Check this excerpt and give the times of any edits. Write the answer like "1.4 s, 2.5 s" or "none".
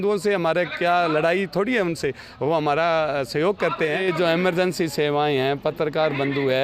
4.0 s